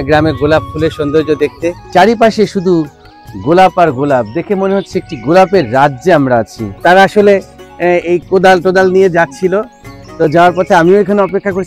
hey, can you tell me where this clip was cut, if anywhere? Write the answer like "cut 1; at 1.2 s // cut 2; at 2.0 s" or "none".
cut 1; at 1.8 s // cut 2; at 6.6 s